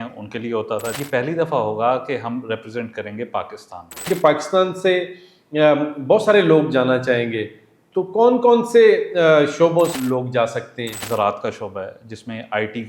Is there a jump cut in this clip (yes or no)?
yes